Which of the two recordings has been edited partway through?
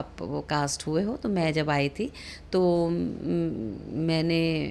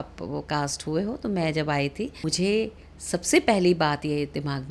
second; 1 cut; at 2.2 s

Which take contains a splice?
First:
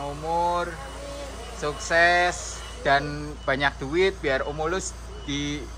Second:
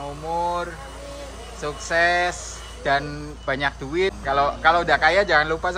second; 1 cut; at 4.2 s

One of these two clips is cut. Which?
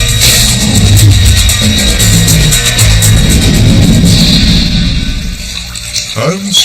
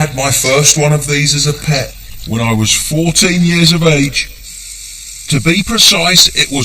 second; 1 cut; at 5.7 s

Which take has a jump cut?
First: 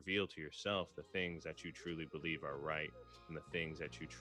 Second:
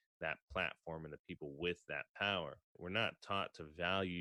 second; 1 cut; at 2.8 s

